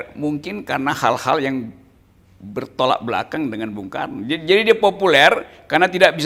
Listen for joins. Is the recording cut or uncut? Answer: uncut